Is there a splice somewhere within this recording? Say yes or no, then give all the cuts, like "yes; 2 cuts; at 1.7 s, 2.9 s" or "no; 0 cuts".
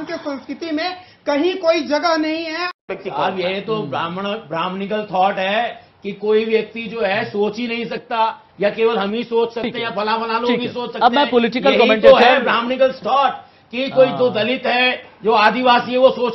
yes; 1 cut; at 2.6 s